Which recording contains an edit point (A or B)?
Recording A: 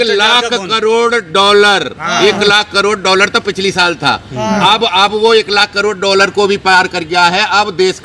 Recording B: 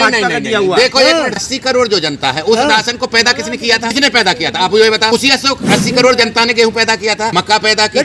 B